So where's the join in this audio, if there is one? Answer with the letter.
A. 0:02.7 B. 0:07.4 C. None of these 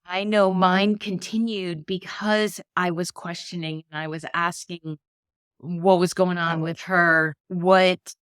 B